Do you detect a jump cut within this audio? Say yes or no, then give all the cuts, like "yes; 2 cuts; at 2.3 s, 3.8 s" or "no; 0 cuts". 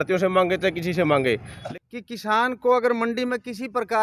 yes; 1 cut; at 1.5 s